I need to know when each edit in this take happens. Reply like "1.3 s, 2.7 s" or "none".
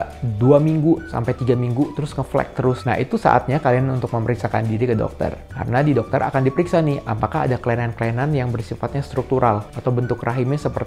none